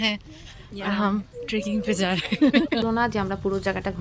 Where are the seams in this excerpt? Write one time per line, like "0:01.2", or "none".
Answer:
0:02.8